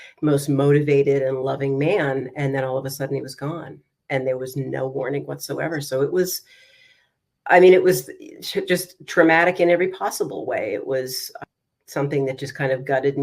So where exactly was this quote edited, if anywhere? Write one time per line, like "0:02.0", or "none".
0:11.3